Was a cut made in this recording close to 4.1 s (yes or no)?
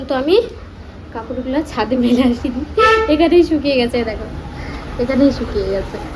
no